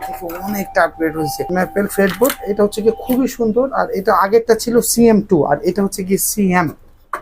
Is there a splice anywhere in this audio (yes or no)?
yes